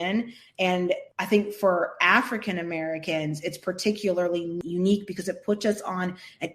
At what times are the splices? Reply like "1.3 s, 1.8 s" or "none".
1.1 s, 4.6 s